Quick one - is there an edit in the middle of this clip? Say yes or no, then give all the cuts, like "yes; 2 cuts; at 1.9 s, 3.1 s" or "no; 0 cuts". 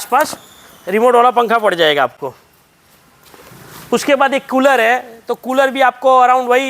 no; 0 cuts